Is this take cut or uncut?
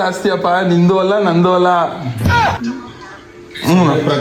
uncut